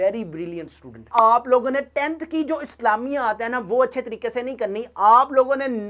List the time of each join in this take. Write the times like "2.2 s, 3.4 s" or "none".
1.1 s